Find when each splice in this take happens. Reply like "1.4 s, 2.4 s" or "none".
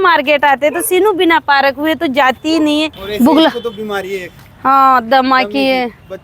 3.0 s